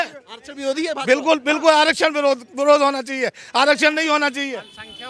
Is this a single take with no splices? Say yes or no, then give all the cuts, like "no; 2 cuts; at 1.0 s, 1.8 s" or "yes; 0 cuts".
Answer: yes; 0 cuts